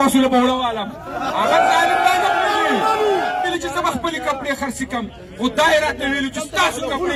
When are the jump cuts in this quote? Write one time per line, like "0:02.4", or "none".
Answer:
none